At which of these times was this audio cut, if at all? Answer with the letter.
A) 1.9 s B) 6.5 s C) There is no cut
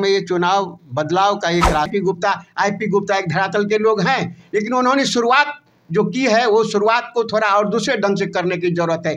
A